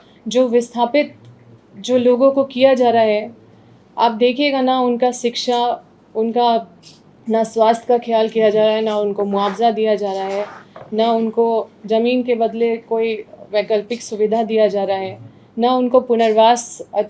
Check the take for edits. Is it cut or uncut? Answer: uncut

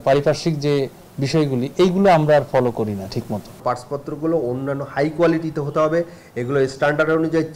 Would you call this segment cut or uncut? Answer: cut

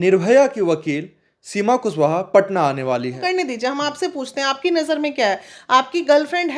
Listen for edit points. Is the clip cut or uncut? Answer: cut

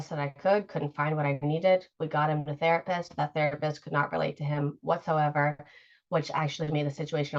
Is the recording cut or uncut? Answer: uncut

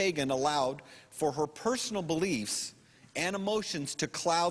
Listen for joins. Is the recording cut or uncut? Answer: cut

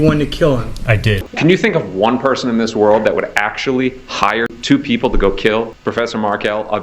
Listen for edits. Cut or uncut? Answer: cut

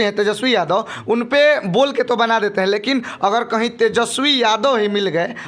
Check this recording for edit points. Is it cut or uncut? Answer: uncut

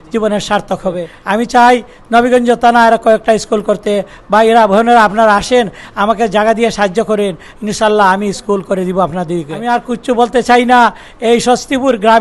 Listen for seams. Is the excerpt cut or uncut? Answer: cut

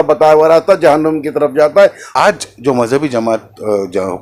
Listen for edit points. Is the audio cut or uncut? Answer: cut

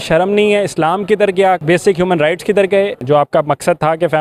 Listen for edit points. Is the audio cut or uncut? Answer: cut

